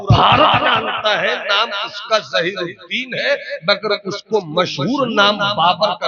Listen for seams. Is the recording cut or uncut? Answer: uncut